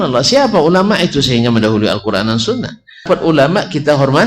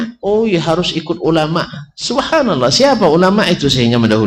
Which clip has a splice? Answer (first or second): first